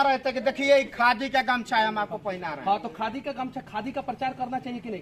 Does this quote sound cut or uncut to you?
uncut